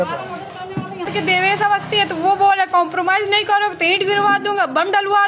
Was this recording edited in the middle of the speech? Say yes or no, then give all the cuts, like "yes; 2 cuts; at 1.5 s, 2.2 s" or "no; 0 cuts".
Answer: yes; 1 cut; at 1.1 s